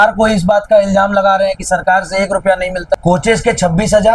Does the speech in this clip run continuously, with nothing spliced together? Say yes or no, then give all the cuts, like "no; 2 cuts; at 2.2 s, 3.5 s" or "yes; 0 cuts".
no; 1 cut; at 3.0 s